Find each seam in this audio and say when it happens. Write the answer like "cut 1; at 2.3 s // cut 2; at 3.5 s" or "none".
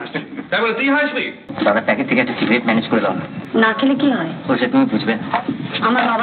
cut 1; at 1.4 s // cut 2; at 3.3 s